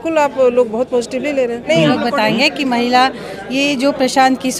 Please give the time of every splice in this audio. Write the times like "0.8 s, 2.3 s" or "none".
1.6 s